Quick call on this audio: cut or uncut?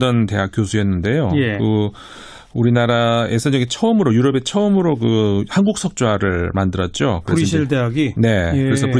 uncut